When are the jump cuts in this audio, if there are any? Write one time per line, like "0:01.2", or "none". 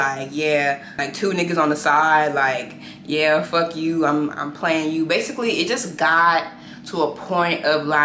0:01.0